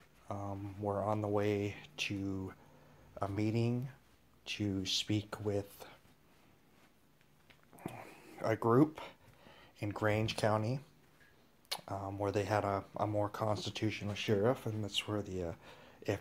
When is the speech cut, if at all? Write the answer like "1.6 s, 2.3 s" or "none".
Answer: none